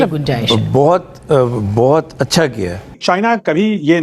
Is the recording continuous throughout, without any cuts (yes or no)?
no